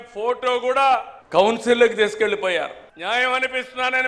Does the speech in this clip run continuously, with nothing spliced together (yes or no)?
no